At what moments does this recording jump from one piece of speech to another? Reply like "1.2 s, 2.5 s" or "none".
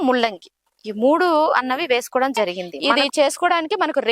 2.7 s